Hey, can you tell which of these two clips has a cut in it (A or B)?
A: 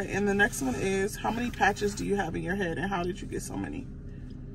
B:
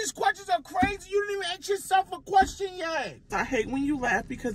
B